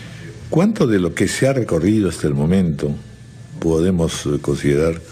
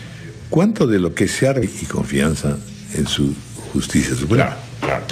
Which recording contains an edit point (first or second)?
first